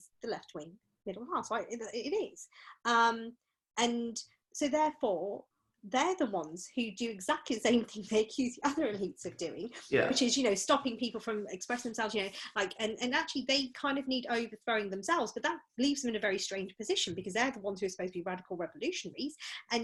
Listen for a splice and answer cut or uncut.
uncut